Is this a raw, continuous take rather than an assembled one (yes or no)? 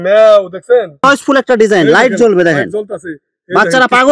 no